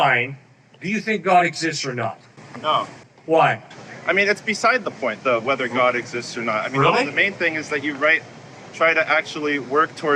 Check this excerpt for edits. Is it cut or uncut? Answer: uncut